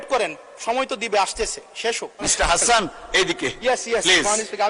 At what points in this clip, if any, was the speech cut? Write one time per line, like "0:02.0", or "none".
0:02.3